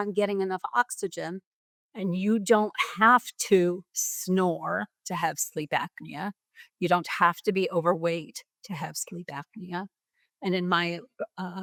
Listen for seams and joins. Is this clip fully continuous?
yes; 0 cuts

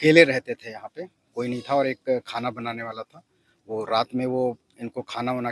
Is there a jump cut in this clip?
no; 0 cuts

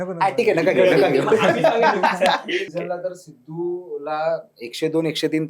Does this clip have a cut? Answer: yes; 1 cut; at 2.7 s

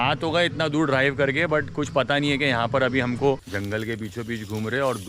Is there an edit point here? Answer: yes; 1 cut; at 3.5 s

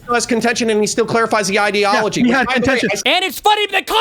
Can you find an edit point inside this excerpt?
yes; 1 cut; at 3.0 s

